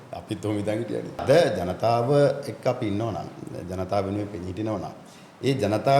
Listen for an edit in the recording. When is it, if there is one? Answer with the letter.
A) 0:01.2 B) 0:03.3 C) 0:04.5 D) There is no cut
A